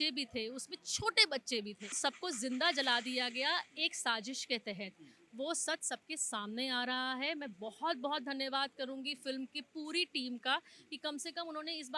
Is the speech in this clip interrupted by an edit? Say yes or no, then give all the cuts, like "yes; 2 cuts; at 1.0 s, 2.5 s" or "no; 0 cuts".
yes; 1 cut; at 2.0 s